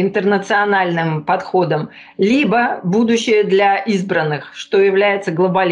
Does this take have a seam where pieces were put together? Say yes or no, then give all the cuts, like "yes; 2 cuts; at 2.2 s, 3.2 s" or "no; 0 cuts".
no; 0 cuts